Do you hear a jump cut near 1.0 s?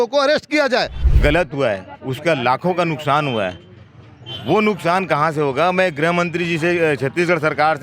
yes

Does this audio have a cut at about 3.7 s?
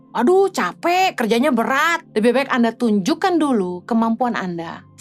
no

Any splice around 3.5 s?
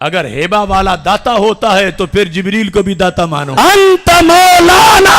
yes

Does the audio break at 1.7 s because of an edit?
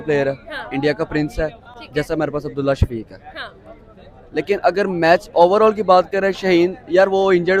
no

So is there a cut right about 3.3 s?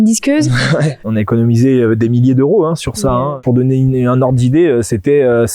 yes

